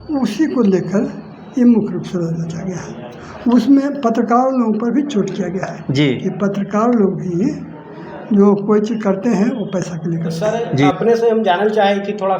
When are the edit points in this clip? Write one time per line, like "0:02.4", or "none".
0:10.9